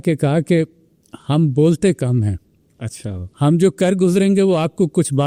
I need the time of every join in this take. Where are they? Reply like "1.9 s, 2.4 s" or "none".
none